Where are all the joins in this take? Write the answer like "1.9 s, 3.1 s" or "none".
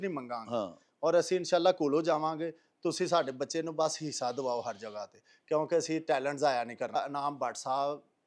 7.0 s